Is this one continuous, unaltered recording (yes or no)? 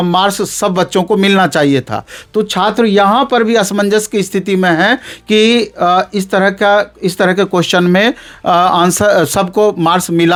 yes